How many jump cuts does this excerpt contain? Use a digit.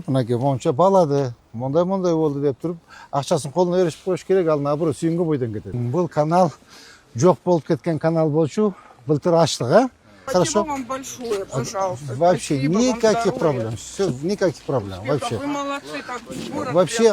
2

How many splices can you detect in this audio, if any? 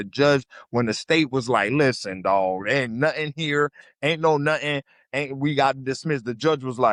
0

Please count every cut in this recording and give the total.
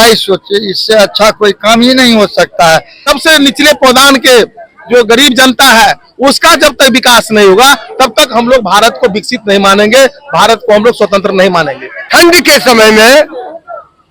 2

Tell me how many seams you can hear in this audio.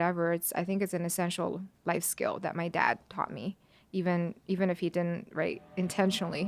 0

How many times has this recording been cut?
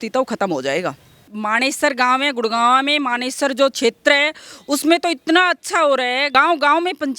2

